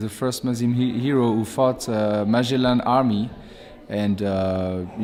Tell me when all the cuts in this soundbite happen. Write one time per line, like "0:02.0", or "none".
none